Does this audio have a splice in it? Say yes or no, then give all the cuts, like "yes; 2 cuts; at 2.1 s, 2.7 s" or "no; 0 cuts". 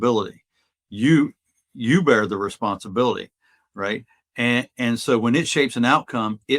no; 0 cuts